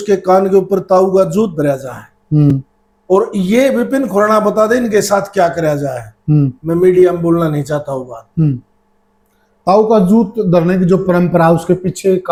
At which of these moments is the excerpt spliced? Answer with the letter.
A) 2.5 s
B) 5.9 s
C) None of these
C